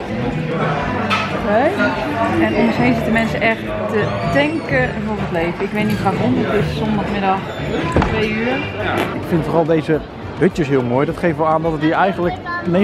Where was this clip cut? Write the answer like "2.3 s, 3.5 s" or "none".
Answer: 9.1 s